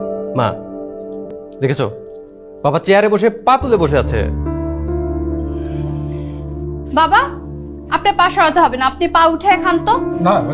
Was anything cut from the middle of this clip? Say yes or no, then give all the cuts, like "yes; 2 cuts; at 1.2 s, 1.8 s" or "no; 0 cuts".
yes; 1 cut; at 1.4 s